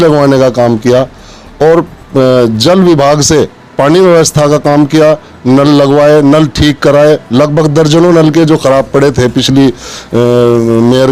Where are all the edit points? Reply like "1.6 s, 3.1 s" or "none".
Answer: none